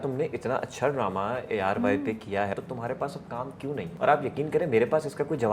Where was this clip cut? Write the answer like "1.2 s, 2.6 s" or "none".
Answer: 2.5 s, 3.9 s

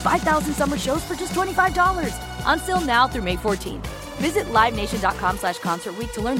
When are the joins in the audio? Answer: none

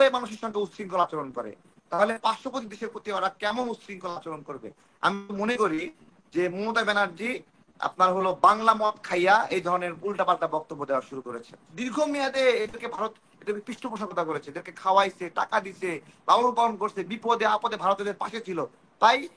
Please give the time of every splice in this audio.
11.8 s

